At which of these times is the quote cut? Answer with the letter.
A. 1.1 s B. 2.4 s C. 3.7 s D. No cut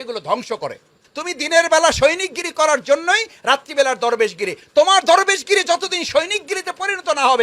A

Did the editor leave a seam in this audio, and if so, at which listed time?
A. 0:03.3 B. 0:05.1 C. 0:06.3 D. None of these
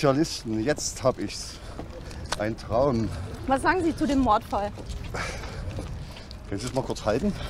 A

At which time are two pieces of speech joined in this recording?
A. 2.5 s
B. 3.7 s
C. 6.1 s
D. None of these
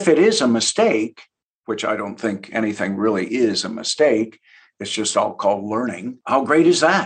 C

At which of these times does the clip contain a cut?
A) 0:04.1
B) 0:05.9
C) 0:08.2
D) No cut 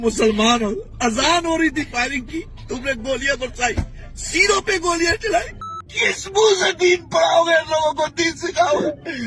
B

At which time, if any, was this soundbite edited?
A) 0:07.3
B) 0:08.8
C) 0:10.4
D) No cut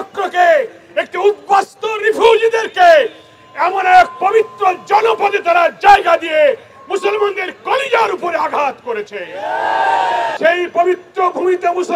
C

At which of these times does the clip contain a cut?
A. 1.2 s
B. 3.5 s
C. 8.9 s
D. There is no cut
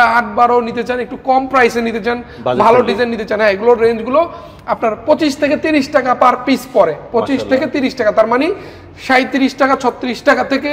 D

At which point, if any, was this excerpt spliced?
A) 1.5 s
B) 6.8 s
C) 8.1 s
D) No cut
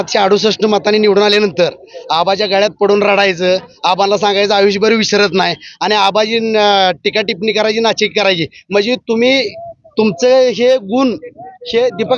D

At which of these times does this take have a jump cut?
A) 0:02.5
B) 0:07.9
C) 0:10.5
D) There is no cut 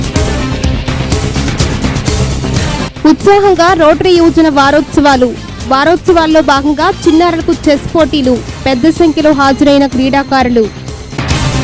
A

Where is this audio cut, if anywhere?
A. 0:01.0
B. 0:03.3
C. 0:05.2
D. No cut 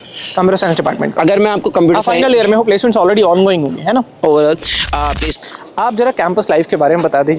C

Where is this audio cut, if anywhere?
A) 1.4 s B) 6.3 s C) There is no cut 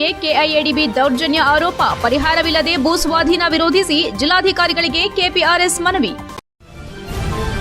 B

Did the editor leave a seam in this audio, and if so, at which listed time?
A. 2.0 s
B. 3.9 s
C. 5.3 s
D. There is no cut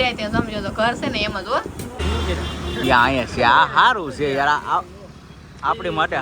A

